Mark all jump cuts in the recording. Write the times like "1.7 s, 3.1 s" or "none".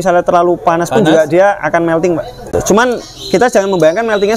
2.5 s